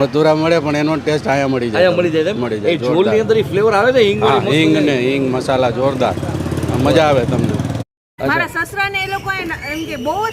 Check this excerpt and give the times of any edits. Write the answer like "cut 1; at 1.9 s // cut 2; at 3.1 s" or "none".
cut 1; at 7.8 s